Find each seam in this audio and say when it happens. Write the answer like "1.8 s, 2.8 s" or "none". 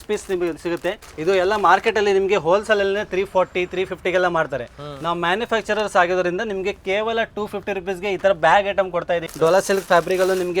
1.1 s, 9.3 s

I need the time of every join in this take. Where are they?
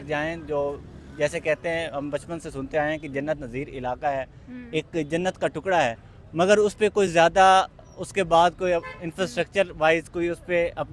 none

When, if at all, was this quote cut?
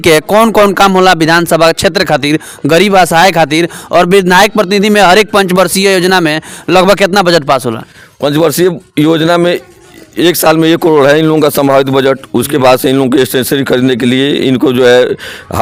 none

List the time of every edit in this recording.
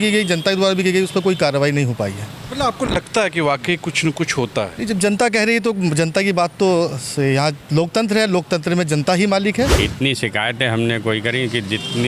9.8 s

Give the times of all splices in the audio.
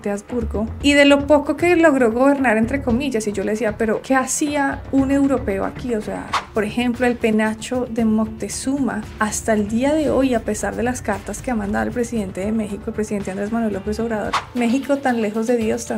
6.4 s, 14.4 s

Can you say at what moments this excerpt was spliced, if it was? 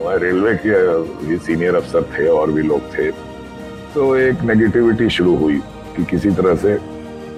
none

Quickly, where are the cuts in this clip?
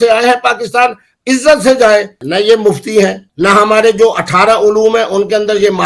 2.2 s, 3.2 s

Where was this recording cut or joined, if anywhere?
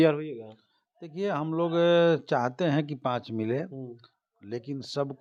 none

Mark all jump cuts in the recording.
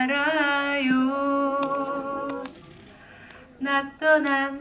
none

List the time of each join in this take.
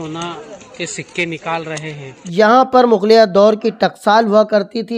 2.3 s

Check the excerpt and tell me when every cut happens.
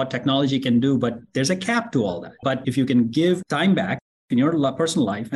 2.4 s

